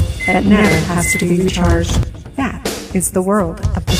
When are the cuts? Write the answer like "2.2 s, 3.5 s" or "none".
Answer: 2.8 s